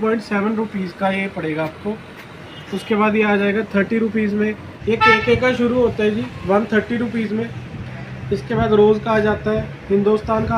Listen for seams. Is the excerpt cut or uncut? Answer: cut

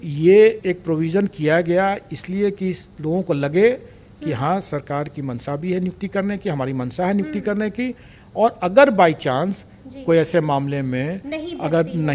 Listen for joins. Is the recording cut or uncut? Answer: uncut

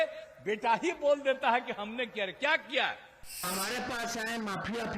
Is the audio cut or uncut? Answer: cut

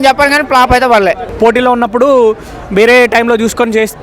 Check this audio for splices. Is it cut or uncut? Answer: cut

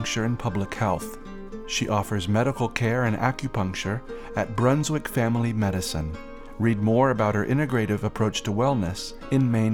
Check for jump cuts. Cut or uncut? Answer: uncut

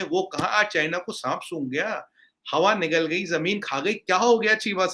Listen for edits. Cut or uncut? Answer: uncut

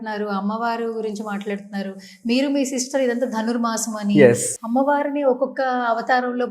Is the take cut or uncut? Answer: cut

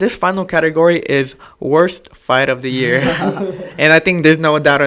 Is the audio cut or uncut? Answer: uncut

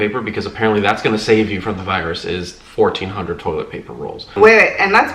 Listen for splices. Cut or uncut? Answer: cut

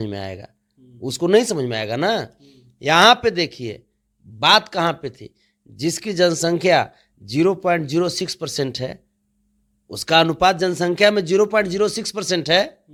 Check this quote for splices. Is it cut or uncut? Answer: uncut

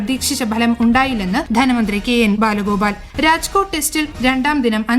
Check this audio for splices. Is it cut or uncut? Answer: cut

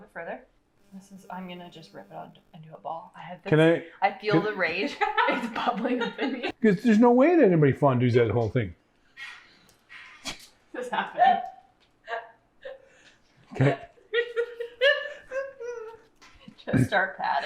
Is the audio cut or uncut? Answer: uncut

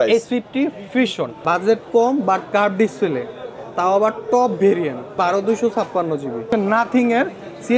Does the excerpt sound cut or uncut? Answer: cut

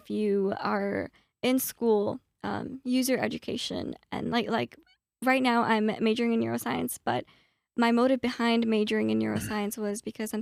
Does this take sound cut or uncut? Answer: uncut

